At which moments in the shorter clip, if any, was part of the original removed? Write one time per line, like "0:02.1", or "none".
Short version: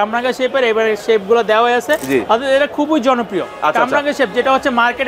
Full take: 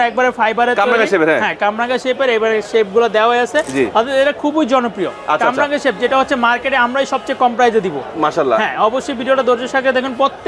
none